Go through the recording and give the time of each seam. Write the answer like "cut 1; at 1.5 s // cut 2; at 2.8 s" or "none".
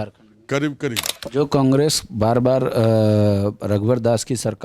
cut 1; at 1.1 s